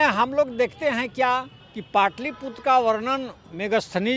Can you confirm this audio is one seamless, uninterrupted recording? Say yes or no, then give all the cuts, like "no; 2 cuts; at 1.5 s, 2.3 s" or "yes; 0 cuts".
yes; 0 cuts